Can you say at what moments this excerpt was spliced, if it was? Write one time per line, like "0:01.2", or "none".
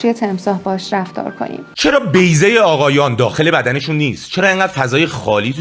0:01.6

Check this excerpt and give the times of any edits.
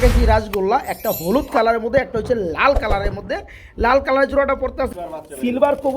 0:04.9

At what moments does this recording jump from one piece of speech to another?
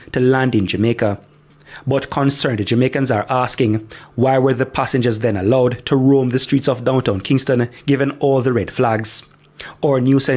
none

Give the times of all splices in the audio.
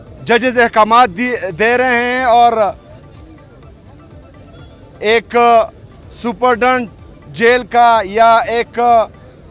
none

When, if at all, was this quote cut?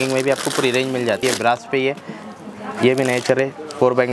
0:01.2

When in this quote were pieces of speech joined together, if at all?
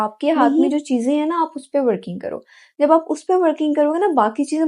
none

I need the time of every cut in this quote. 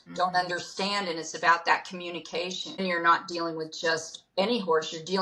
0:02.8

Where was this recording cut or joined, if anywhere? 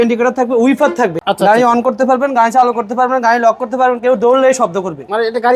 0:01.2

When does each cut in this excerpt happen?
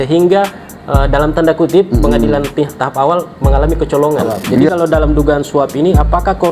0:04.7

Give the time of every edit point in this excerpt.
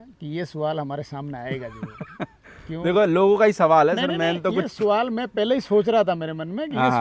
none

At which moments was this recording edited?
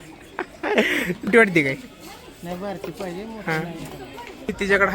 0:01.3

